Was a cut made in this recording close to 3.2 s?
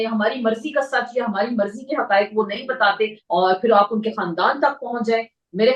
yes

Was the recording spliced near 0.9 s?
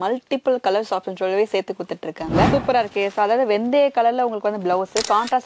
no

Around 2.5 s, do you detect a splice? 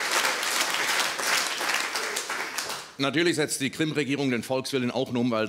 yes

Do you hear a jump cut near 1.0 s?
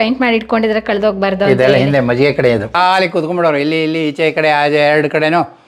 no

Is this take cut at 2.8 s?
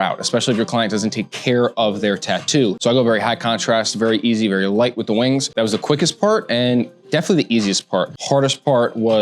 yes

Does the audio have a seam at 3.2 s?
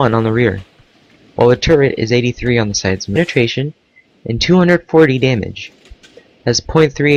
no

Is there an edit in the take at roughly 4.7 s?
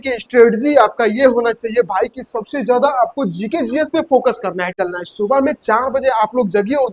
yes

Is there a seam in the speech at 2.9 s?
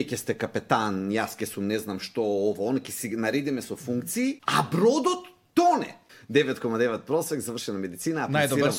no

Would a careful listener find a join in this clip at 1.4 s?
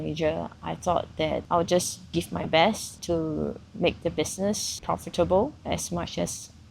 yes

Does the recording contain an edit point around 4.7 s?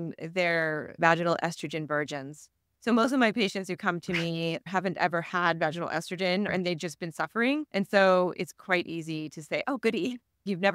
yes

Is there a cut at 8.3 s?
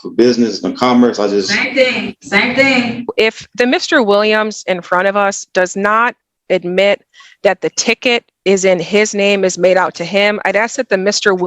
no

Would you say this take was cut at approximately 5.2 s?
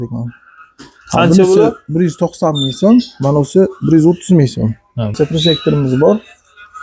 yes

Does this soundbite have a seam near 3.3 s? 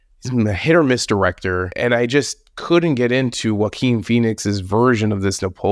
no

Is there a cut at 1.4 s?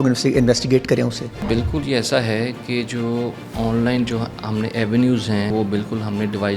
yes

